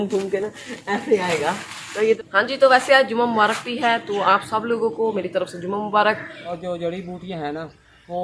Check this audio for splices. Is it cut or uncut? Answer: cut